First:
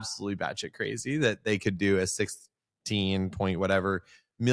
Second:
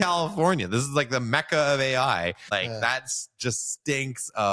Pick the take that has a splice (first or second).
second